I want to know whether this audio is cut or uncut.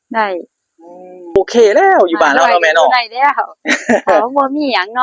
cut